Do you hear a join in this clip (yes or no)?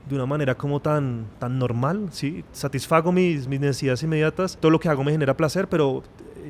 yes